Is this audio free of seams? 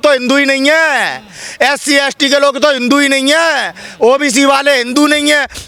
yes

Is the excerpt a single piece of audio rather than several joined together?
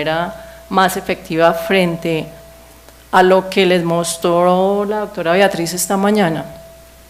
no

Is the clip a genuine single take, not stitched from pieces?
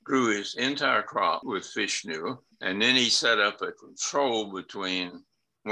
no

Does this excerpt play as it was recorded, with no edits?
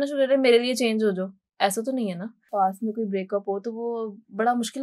no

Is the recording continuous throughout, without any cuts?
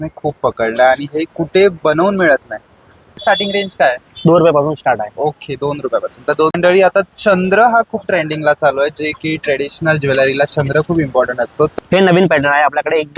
no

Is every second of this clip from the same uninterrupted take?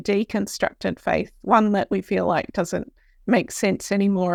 yes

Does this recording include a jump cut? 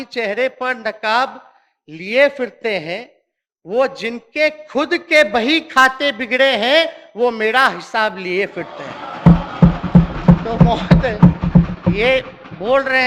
no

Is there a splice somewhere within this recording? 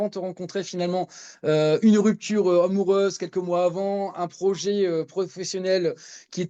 no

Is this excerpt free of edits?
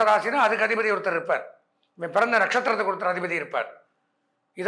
yes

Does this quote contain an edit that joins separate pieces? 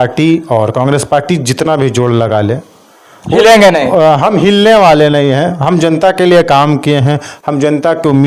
no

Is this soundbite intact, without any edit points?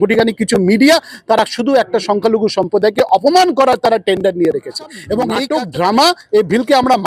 no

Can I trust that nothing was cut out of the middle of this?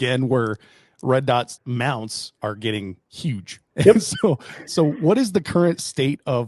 no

